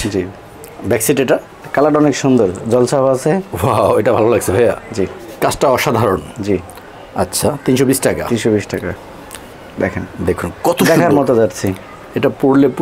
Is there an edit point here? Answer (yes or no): yes